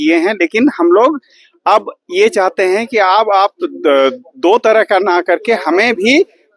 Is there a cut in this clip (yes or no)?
no